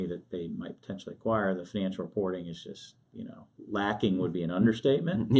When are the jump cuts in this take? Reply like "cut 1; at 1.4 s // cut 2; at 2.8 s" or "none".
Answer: cut 1; at 3.5 s

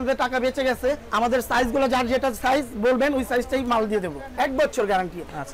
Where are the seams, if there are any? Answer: cut 1; at 1.1 s // cut 2; at 4.3 s

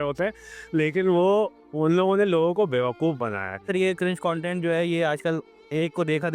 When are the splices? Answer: cut 1; at 3.7 s

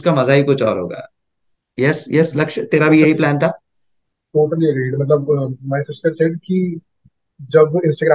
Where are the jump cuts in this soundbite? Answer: none

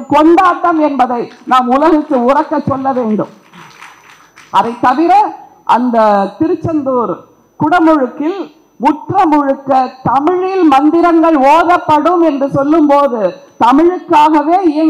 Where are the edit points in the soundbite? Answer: none

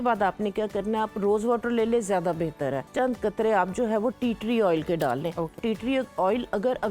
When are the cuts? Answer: cut 1; at 2.9 s // cut 2; at 5.6 s

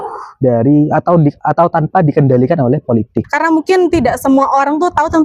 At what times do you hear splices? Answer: cut 1; at 3.3 s

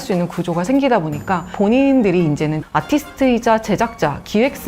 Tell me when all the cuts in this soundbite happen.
cut 1; at 1.5 s

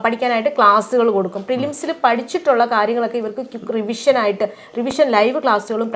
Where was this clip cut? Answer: none

